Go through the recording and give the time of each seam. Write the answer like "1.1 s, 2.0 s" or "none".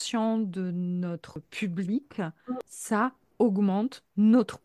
1.5 s, 2.7 s